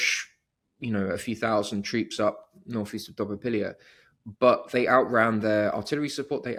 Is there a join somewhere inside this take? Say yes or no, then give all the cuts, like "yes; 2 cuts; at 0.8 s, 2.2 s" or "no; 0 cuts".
no; 0 cuts